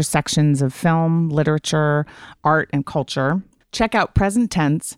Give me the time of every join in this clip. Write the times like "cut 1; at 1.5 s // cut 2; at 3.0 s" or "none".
cut 1; at 3.6 s